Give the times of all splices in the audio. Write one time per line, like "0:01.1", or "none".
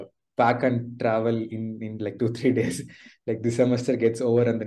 none